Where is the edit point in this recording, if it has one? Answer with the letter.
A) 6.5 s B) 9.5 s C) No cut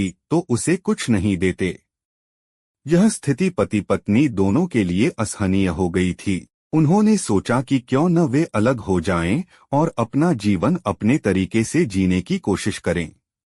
A